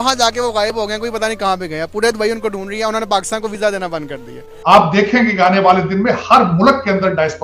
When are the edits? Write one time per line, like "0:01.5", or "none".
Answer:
0:04.5

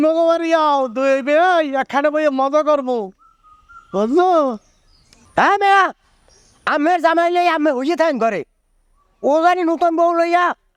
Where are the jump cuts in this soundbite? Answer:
none

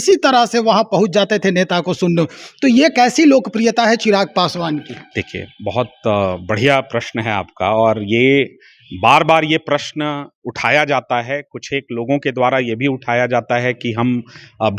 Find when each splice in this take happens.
none

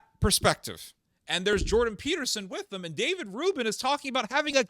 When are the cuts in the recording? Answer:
0:01.5

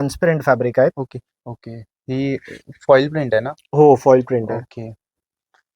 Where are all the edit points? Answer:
0:01.2

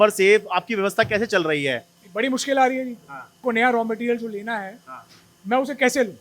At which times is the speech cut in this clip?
0:03.4

